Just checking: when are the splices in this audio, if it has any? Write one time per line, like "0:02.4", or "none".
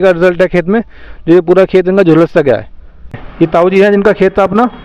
0:03.1